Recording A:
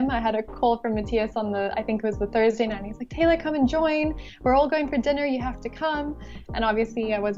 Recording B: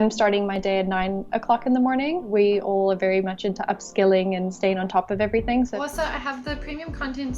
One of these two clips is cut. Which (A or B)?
B